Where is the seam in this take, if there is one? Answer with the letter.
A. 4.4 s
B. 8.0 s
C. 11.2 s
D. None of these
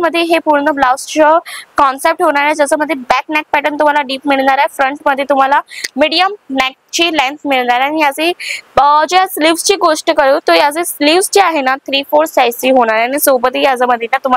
D